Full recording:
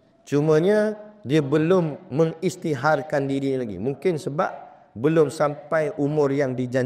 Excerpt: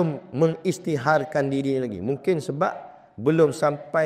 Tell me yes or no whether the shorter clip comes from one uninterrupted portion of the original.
yes